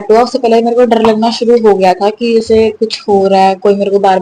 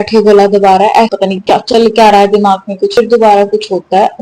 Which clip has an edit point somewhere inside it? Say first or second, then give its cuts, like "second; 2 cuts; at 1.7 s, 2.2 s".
second; 2 cuts; at 1.1 s, 3.0 s